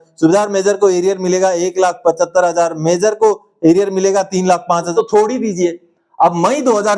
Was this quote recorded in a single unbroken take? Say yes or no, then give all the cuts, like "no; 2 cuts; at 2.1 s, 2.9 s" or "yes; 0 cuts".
no; 1 cut; at 4.9 s